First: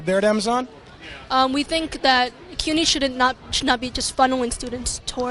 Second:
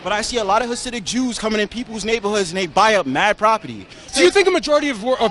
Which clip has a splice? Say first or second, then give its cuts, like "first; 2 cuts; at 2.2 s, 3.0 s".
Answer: second; 1 cut; at 4.1 s